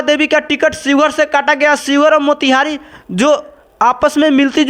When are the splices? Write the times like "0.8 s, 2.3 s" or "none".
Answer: none